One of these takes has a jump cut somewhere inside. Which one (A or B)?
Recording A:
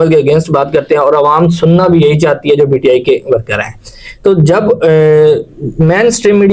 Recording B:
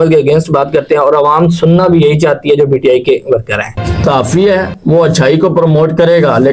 B